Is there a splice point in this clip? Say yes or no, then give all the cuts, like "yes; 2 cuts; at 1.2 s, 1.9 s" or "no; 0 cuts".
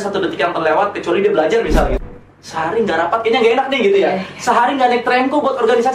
yes; 1 cut; at 2.0 s